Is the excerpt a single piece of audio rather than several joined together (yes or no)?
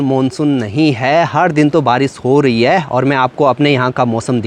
yes